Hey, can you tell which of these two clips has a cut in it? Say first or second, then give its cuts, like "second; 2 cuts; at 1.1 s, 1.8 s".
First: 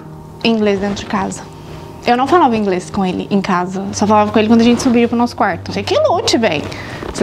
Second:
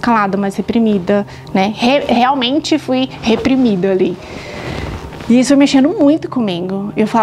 first; 1 cut; at 5.7 s